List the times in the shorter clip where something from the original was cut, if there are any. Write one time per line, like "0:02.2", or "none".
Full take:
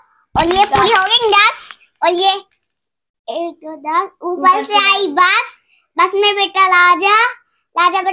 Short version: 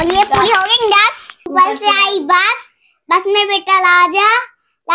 0:01.4

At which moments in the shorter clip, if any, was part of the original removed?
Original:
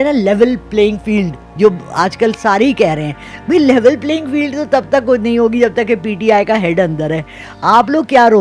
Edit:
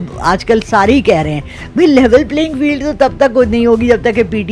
none

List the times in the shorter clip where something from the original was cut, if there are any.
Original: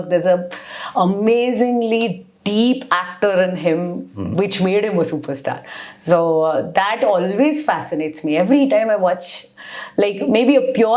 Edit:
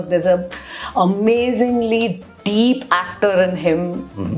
none

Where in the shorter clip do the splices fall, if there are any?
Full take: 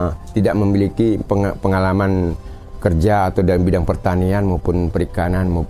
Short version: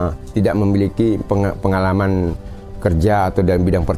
none

